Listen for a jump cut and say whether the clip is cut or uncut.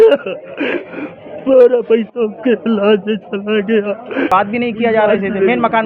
cut